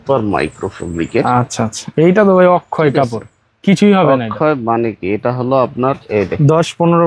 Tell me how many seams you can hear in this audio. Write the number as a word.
zero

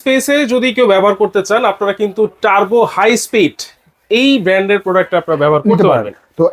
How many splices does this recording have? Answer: zero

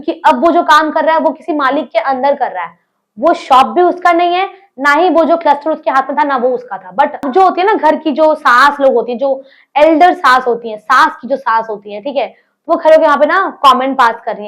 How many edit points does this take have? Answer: one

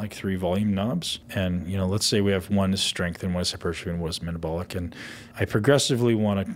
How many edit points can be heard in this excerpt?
two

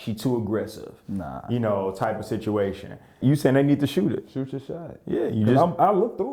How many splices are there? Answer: one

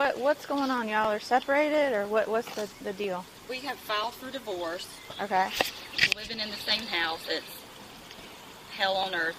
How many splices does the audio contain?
zero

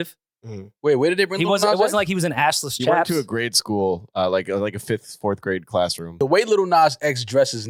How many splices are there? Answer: one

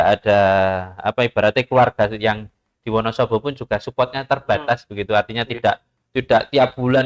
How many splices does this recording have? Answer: zero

